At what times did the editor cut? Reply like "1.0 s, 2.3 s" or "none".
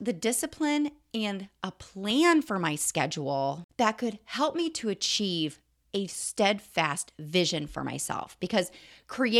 3.6 s